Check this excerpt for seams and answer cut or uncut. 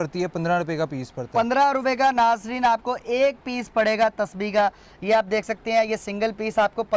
uncut